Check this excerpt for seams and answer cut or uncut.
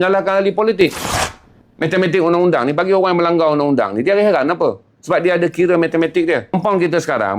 cut